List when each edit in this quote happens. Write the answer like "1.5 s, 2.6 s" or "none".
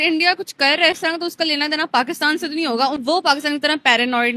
2.9 s

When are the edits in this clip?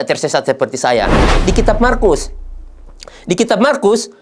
1.2 s

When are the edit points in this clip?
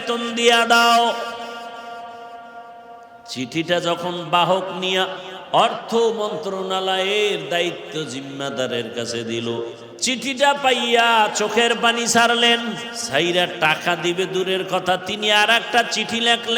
9.9 s, 12.9 s

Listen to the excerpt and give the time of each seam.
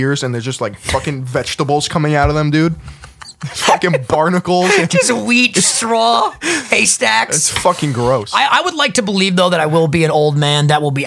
none

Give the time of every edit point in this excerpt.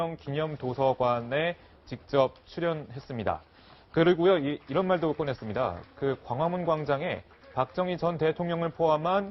2.2 s

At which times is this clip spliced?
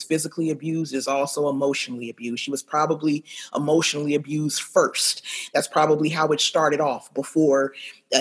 none

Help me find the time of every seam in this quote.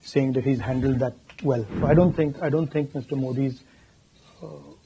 1.7 s

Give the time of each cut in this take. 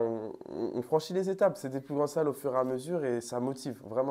none

